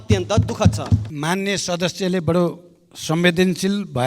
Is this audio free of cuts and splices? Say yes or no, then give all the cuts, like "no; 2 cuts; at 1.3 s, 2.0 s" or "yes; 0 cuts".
no; 1 cut; at 1.0 s